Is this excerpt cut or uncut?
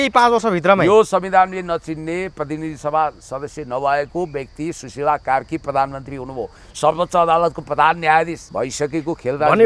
cut